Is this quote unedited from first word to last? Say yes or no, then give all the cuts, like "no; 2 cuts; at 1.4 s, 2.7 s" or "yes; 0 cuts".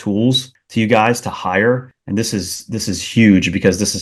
yes; 0 cuts